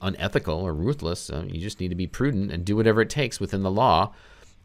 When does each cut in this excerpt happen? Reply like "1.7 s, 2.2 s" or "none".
none